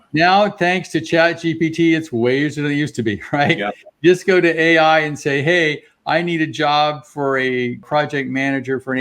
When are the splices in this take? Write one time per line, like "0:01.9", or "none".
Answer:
0:07.8